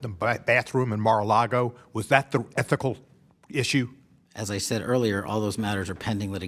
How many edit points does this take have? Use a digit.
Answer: 0